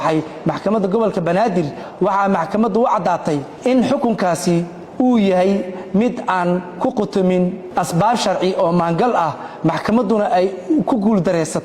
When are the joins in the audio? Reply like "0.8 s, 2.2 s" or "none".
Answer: 1.8 s, 3.5 s, 7.6 s